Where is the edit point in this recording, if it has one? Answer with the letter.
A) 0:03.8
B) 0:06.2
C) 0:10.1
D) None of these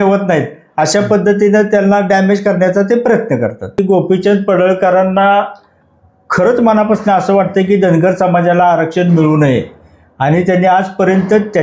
A